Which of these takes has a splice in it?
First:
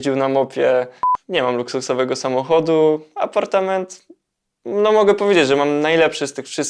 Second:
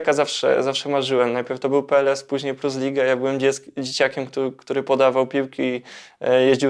first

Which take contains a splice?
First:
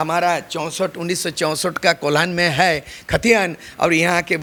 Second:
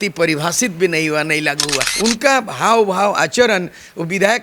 second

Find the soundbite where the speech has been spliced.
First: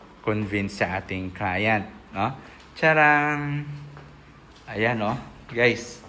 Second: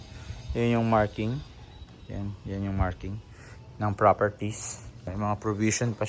second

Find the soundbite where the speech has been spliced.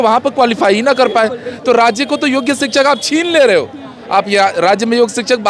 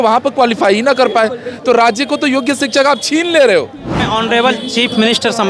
second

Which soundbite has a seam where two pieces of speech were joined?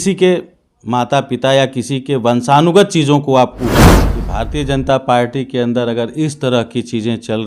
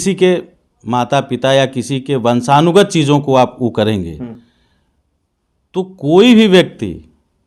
first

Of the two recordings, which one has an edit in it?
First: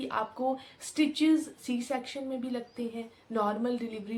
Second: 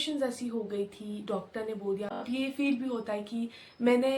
second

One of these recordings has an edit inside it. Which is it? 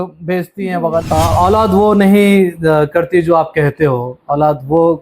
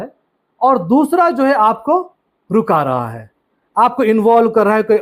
first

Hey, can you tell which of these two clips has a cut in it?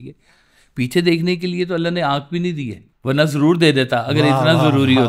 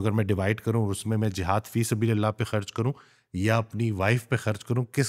first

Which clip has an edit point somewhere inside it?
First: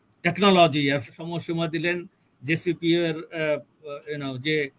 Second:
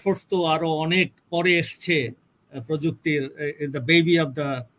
first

